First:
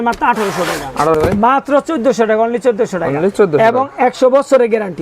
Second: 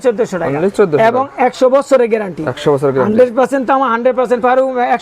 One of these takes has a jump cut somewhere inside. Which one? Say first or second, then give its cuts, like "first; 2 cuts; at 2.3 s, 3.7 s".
first; 1 cut; at 1.1 s